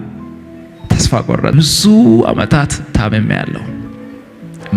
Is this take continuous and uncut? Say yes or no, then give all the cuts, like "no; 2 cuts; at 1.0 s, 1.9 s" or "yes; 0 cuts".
no; 1 cut; at 1.5 s